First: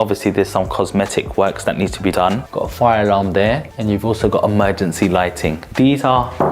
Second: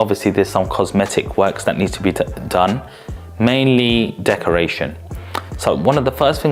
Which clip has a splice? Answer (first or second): first